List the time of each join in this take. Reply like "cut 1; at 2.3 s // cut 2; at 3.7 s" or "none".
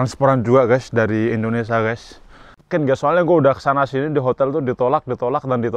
cut 1; at 2.7 s